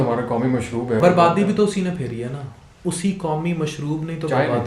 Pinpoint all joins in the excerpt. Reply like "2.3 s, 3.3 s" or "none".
1.0 s